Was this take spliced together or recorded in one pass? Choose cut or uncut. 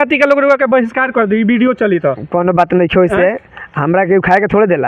uncut